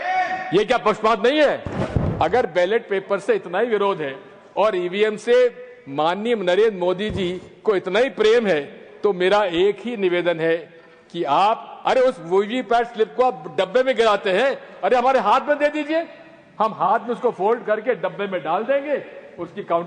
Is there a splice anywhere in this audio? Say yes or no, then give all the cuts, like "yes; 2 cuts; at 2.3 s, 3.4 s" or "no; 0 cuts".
yes; 2 cuts; at 2.0 s, 11.7 s